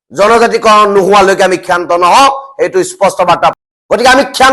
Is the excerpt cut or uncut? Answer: cut